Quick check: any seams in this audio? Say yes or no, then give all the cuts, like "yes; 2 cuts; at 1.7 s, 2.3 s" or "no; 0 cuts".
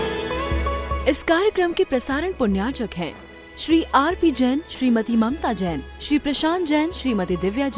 yes; 1 cut; at 1.0 s